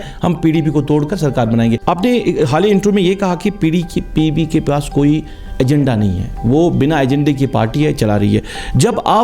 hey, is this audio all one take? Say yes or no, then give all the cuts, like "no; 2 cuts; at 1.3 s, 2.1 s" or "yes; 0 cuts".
no; 1 cut; at 1.8 s